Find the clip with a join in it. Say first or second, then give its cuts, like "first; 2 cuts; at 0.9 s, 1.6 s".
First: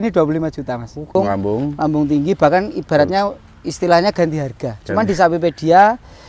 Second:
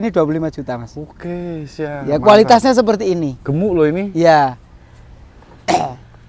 first; 1 cut; at 1.1 s